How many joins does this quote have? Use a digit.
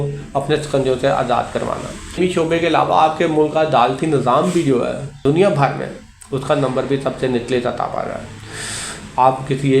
1